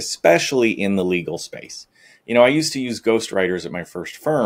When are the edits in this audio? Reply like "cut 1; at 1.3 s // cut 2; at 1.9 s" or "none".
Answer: none

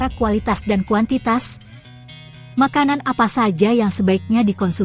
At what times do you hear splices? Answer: cut 1; at 1.9 s

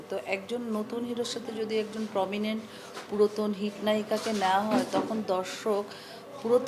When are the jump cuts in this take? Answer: none

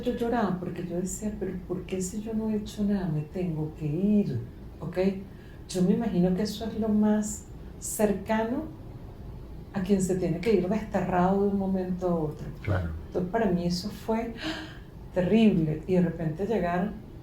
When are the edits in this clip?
none

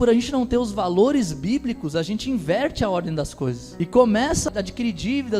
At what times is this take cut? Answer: cut 1; at 4.5 s

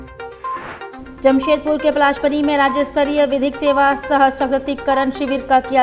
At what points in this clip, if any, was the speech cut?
cut 1; at 0.9 s

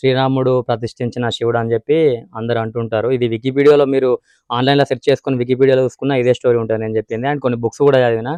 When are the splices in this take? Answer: none

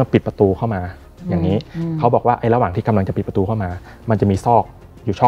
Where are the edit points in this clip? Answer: none

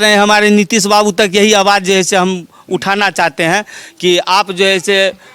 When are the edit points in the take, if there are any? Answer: none

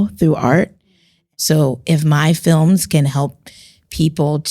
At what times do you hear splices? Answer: cut 1; at 1.2 s

